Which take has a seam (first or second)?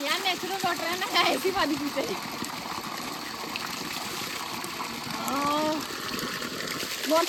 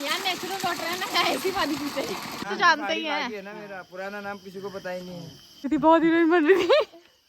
second